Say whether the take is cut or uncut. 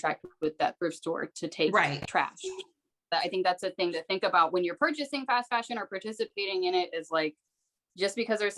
cut